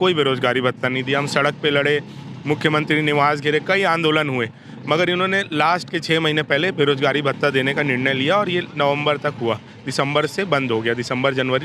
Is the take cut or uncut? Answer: uncut